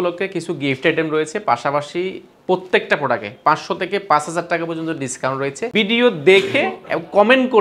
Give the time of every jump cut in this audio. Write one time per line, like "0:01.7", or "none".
0:05.6